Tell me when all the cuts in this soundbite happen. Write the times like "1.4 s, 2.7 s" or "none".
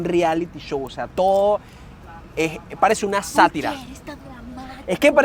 none